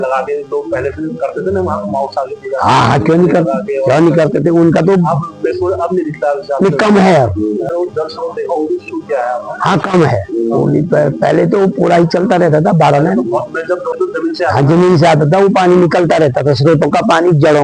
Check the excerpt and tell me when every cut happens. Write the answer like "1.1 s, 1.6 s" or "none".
7.7 s, 13.9 s